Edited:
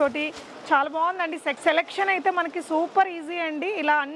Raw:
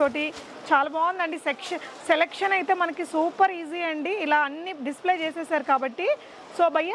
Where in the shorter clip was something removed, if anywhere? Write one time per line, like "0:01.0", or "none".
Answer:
0:01.5

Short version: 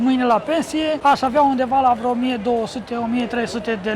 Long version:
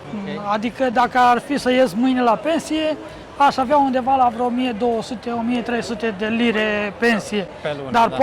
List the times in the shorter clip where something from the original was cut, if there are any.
0:01.0

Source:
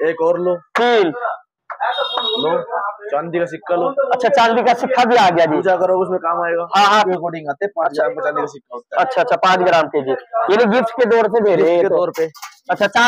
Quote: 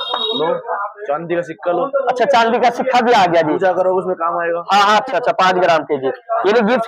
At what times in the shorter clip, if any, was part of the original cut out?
0:05.0

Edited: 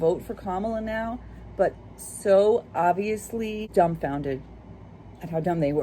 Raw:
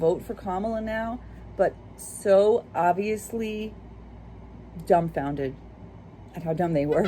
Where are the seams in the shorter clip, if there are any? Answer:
0:03.7

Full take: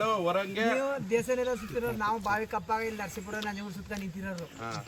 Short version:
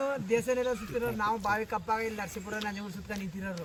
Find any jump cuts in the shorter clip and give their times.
none

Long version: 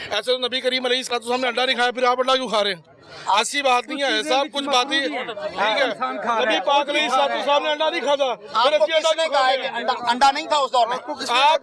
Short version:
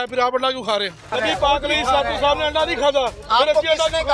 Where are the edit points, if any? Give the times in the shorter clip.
0:01.1

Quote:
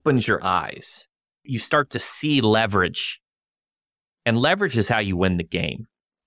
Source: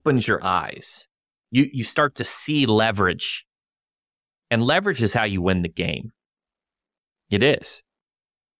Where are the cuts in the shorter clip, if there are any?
0:01.5

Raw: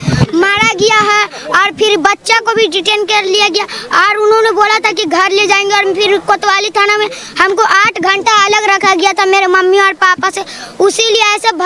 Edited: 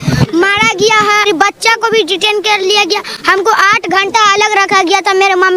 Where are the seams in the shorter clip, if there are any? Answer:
0:01.3
0:03.1

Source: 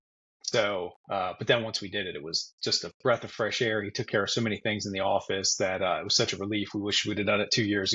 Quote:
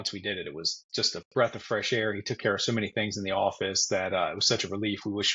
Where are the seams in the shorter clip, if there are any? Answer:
none

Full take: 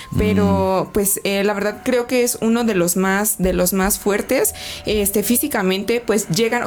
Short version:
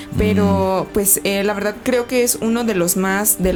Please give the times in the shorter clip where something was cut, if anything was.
none

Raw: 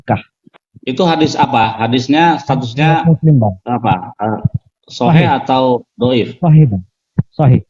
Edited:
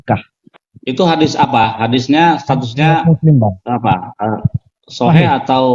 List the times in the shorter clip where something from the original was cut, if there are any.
none

